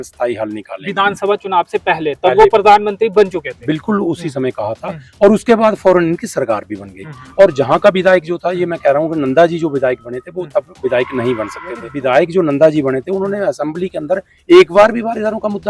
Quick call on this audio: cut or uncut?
cut